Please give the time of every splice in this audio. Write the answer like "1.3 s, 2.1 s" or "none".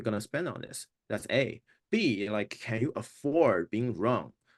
none